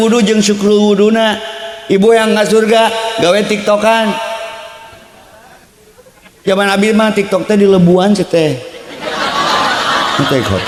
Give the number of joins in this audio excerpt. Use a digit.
0